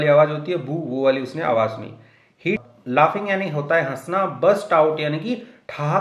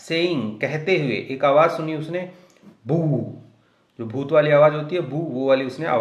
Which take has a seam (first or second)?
first